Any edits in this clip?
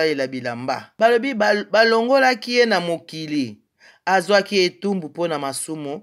yes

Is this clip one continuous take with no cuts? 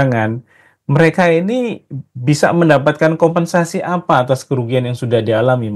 yes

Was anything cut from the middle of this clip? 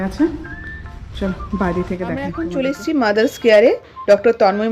yes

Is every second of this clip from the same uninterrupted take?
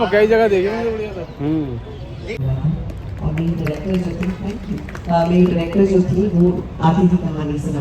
no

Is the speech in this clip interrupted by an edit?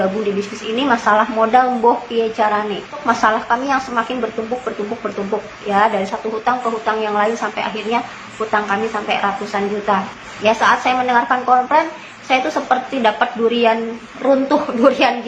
yes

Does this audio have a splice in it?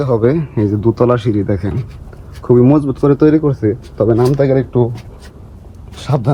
no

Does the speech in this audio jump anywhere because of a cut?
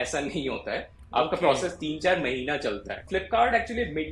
yes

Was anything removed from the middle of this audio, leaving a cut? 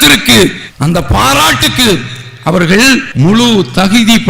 yes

